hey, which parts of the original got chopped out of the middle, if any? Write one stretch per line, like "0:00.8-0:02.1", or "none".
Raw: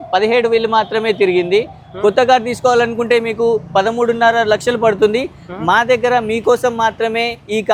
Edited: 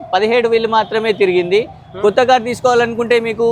none